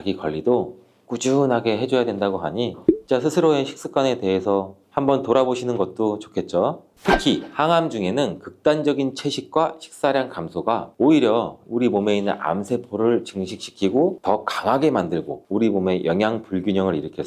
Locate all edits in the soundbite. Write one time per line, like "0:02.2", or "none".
0:06.9